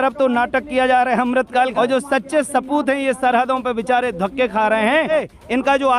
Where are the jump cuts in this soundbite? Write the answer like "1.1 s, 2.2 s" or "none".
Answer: 1.7 s, 5.1 s